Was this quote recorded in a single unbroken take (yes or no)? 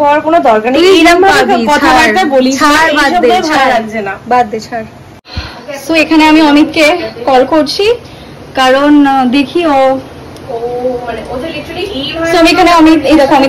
yes